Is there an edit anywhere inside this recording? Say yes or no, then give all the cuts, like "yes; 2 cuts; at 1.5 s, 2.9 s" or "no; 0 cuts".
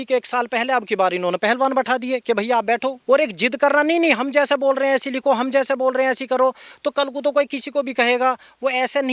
yes; 1 cut; at 3.0 s